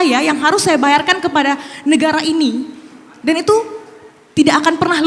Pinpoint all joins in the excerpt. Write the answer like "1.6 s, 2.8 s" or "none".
none